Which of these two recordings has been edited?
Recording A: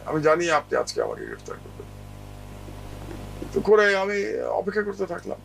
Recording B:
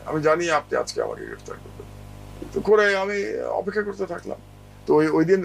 B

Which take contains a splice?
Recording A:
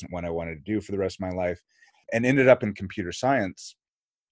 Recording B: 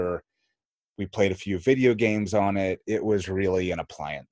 A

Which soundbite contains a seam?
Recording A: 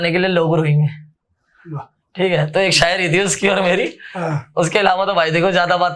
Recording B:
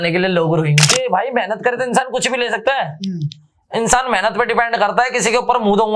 B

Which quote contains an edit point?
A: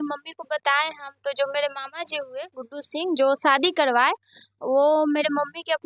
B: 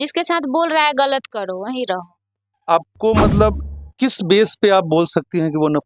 B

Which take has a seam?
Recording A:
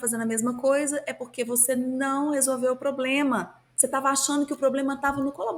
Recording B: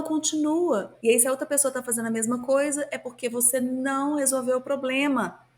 B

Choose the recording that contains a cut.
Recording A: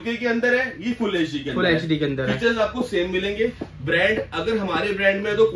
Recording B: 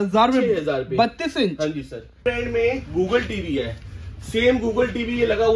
B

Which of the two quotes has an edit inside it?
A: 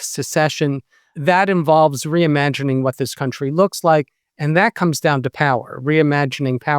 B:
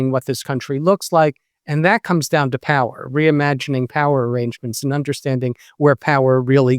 A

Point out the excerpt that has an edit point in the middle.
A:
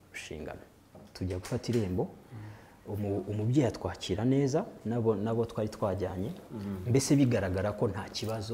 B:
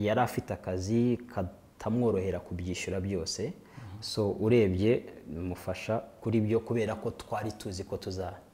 A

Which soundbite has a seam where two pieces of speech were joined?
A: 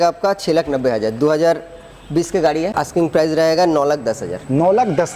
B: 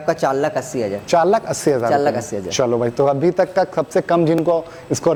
A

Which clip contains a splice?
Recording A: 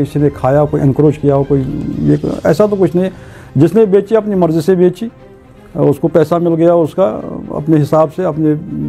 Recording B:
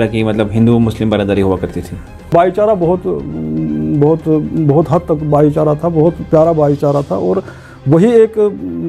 B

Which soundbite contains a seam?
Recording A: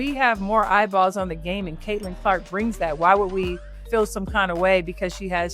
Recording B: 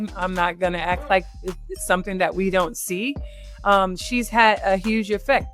B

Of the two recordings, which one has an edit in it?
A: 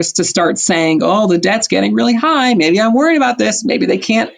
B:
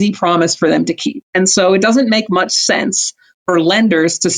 B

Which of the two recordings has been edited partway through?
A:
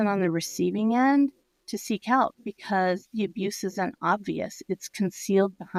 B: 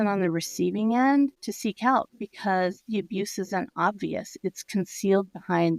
B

